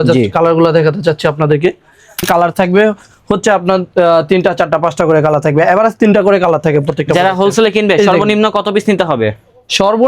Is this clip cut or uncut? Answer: cut